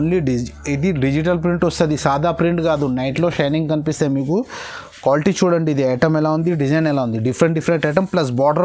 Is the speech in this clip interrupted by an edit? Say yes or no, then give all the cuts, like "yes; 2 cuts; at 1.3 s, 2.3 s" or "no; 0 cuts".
no; 0 cuts